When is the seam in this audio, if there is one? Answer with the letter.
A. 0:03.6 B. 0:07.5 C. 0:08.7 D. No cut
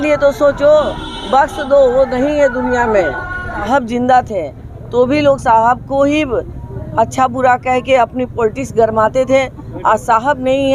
A